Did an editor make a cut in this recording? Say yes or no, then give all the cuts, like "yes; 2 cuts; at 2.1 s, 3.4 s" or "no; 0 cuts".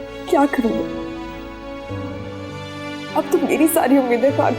no; 0 cuts